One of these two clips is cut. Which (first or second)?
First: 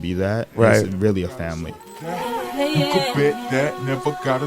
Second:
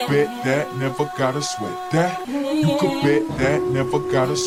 first